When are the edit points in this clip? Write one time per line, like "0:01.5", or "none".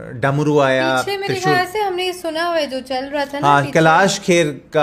none